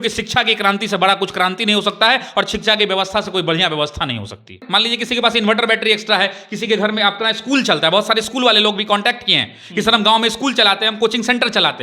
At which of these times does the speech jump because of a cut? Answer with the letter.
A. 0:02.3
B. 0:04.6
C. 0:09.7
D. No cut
B